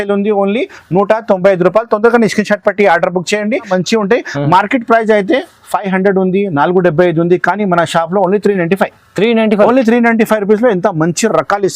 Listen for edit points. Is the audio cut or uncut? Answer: cut